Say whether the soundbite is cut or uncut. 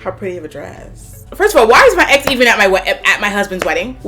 cut